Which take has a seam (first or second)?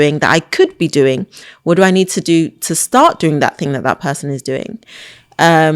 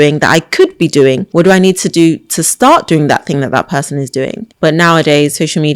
second